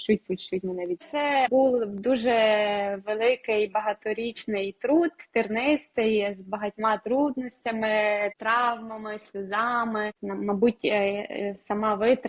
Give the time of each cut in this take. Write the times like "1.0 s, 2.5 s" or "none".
1.1 s, 8.4 s, 10.2 s